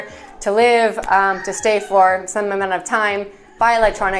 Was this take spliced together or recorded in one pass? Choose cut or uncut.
uncut